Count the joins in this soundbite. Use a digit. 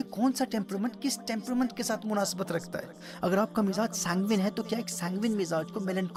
0